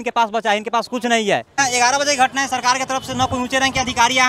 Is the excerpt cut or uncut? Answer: uncut